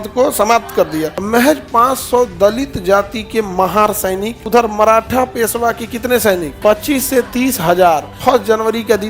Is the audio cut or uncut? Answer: cut